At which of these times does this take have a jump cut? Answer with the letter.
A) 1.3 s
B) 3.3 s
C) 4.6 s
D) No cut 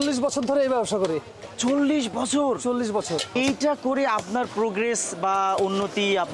B